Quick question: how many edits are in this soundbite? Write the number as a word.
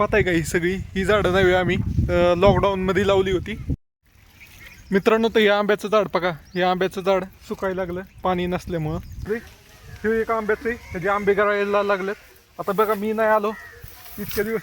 two